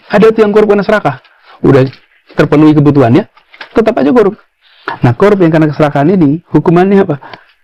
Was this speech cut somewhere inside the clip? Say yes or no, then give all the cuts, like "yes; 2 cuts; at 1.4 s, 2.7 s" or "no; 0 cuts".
no; 0 cuts